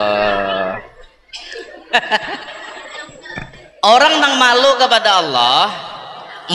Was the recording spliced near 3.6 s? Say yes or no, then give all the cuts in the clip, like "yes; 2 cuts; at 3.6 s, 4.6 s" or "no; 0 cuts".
yes; 1 cut; at 3.6 s